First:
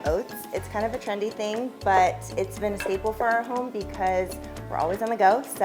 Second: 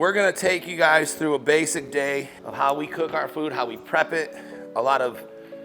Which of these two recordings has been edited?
second; 1 cut; at 2.4 s

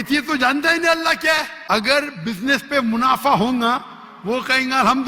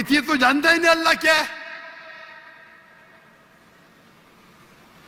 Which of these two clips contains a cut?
first; 1 cut; at 1.5 s

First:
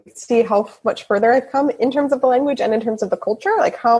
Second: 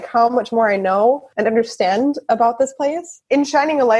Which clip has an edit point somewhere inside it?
second; 2 cuts; at 1.3 s, 3.1 s

